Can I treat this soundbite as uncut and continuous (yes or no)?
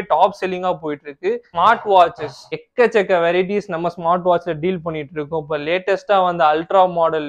no